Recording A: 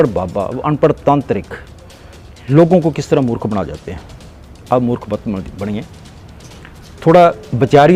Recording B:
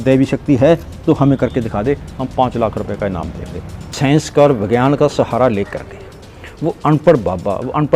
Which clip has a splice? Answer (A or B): B